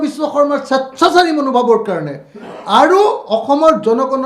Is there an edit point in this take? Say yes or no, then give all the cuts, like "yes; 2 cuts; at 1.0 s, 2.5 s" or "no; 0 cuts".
no; 0 cuts